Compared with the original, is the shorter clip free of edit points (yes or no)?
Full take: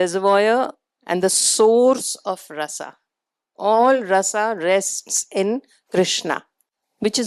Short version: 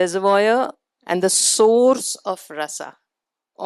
yes